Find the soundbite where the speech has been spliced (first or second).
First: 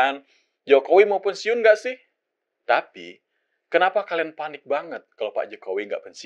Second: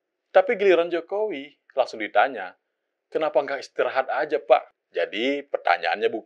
second